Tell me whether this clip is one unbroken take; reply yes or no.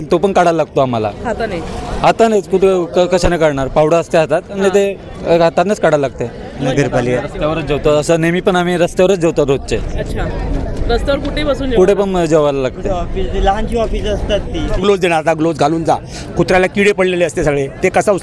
no